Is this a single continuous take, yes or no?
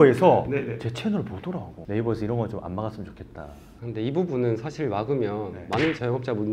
no